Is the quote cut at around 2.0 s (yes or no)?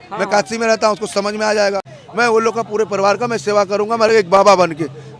yes